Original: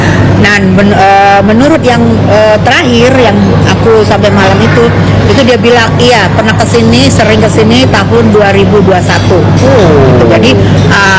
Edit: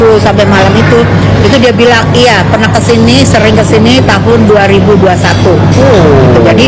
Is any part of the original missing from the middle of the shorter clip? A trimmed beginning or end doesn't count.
no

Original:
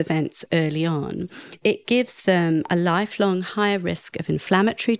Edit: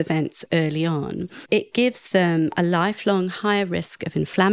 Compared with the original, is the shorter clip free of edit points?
no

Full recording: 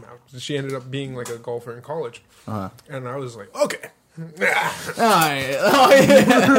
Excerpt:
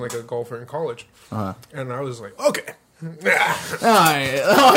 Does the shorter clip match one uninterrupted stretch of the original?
yes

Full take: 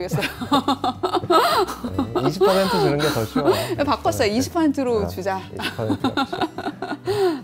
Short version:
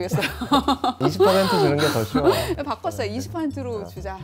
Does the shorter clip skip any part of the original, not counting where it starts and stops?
yes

